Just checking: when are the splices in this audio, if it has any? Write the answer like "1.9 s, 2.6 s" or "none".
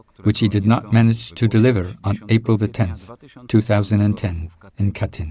none